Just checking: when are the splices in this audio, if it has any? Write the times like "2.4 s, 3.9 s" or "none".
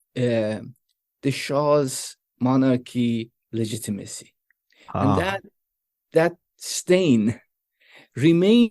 6.0 s